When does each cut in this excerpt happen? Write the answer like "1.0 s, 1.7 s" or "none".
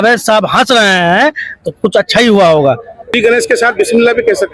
3.1 s